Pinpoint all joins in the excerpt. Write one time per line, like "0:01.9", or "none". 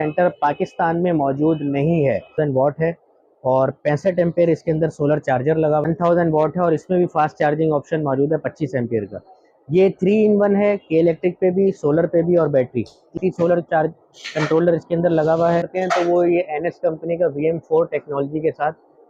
0:02.4
0:05.9
0:13.2
0:15.7